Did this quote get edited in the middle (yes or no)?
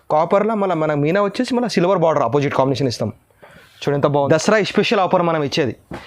yes